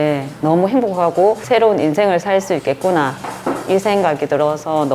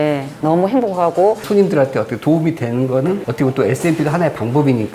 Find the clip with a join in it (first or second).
second